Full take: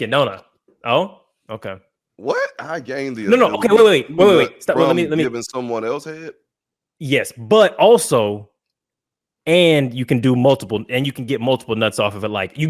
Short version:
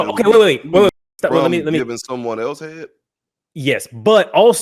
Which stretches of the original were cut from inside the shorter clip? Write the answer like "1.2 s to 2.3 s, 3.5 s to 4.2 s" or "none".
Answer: none